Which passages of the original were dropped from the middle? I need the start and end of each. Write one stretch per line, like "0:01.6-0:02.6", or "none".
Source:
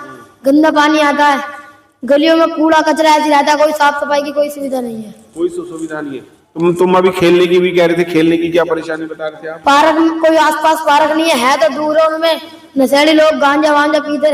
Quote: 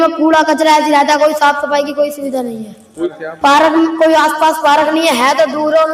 0:05.6-0:09.5

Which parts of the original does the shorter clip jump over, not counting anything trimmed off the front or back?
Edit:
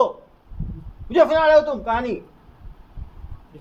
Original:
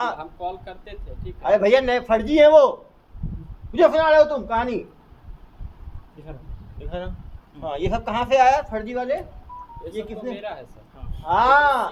none

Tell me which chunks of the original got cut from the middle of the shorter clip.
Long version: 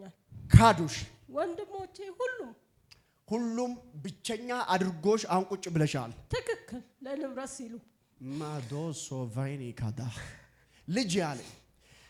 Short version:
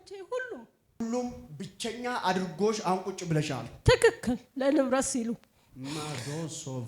0:02.9-0:03.4

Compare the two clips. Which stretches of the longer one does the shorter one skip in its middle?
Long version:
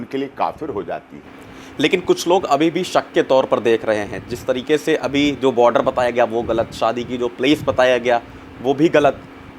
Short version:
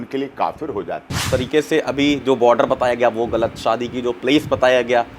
0:01.1-0:04.3

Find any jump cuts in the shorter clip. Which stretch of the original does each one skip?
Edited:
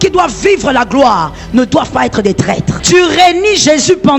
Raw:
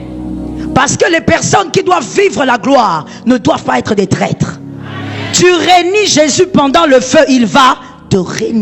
0:04.5-0:05.3

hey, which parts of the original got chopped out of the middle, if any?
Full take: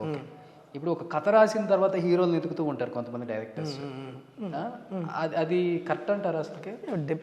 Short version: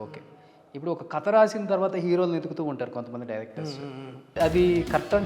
0:04.4-0:05.3

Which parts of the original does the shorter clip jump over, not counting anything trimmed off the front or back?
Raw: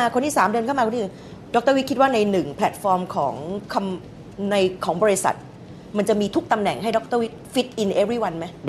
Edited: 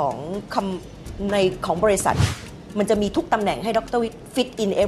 none

